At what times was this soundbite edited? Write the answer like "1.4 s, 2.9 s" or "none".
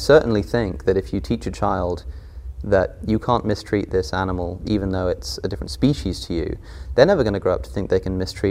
none